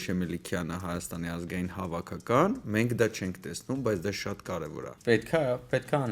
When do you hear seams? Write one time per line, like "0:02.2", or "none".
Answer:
0:04.9

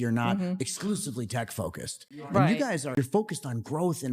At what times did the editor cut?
0:02.9

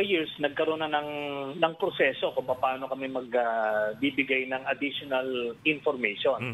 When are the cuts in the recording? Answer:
none

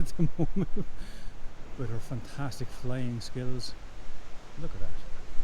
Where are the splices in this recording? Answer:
none

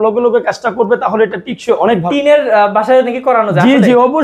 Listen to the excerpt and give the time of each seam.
0:02.0

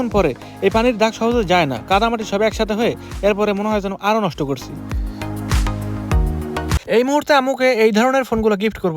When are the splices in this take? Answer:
0:06.8

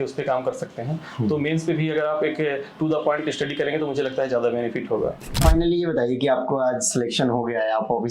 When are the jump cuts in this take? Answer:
0:05.4

